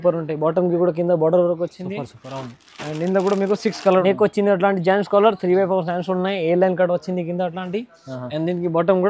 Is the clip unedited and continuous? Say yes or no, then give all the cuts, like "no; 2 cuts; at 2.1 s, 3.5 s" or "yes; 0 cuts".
no; 1 cut; at 4.0 s